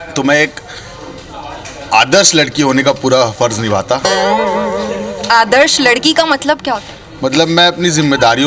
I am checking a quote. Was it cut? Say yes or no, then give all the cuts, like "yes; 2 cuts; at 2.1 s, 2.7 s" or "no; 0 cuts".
no; 0 cuts